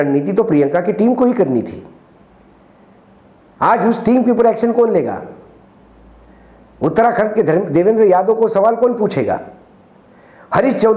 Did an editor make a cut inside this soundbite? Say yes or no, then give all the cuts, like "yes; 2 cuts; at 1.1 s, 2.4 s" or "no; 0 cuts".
no; 0 cuts